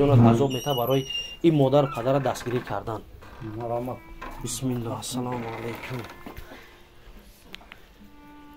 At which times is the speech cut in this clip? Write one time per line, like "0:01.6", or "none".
none